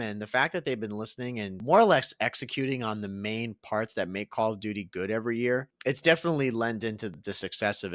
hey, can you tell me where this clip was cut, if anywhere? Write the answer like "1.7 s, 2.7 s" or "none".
1.6 s, 5.7 s, 7.1 s